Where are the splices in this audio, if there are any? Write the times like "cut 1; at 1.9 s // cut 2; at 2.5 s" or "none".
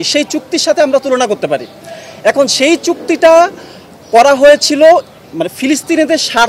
none